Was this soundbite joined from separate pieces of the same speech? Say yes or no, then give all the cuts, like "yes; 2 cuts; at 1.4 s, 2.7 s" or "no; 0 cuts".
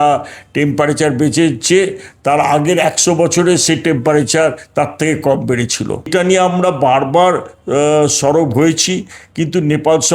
yes; 1 cut; at 6.1 s